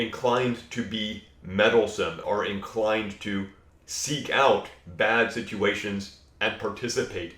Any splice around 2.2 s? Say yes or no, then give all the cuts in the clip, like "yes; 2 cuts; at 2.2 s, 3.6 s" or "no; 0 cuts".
yes; 1 cut; at 2.2 s